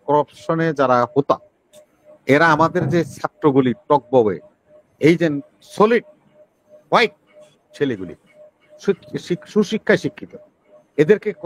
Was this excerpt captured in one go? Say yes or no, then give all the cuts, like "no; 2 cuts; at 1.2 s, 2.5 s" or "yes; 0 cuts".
yes; 0 cuts